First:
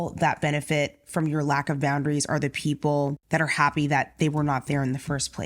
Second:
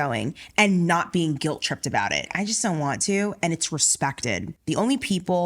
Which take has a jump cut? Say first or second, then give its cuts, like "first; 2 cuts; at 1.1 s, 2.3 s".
second; 2 cuts; at 2.3 s, 4.5 s